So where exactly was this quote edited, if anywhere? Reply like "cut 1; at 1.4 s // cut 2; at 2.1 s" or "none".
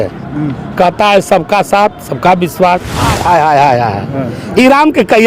cut 1; at 3.0 s